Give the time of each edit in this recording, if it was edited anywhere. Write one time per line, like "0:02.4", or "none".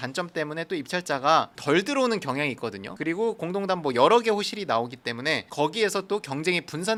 none